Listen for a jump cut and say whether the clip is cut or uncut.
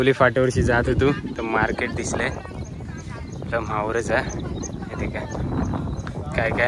uncut